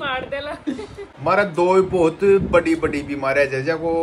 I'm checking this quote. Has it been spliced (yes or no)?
yes